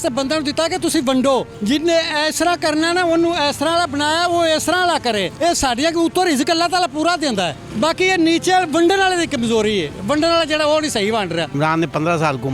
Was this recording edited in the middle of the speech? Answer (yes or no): yes